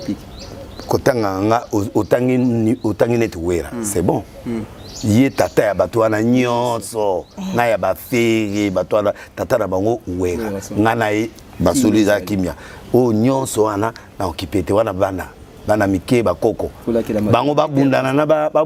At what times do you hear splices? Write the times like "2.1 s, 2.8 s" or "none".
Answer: none